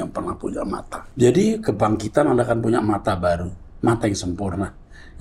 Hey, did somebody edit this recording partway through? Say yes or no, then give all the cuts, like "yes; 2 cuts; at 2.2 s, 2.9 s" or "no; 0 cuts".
yes; 1 cut; at 1.0 s